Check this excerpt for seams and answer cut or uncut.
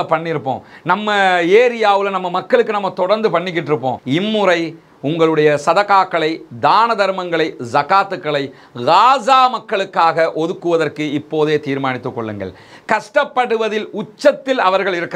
cut